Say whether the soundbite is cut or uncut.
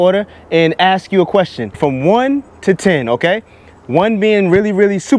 uncut